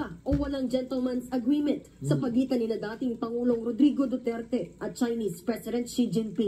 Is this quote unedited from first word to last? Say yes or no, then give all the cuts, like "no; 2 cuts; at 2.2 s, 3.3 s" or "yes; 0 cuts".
no; 2 cuts; at 4.4 s, 5.6 s